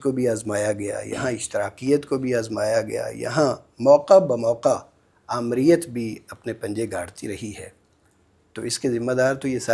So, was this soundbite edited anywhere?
no; 0 cuts

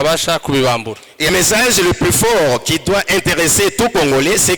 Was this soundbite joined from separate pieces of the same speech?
yes; 1 cut; at 1.3 s

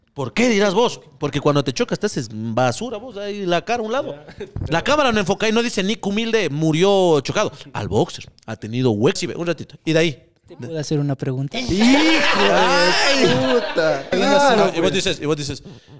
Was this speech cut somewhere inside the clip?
yes; 2 cuts; at 9.2 s, 14.1 s

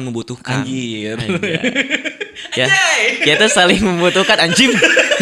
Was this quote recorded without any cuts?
yes; 0 cuts

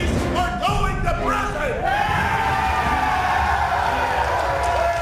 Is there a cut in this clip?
yes; 1 cut; at 2.9 s

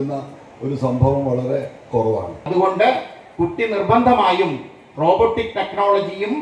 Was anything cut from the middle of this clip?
yes; 1 cut; at 2.5 s

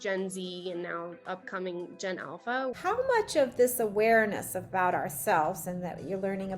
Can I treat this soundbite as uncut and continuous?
no; 1 cut; at 2.7 s

